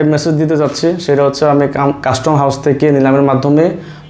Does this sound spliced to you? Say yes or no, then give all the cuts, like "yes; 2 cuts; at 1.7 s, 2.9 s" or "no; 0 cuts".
no; 0 cuts